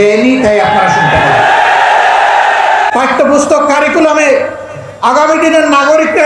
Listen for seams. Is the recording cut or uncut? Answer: cut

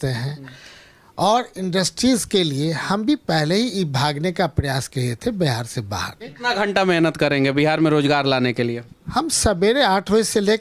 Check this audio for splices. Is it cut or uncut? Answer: cut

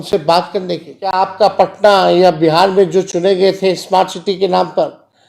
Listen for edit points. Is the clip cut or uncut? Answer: cut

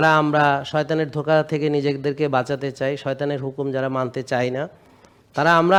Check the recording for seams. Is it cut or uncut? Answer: uncut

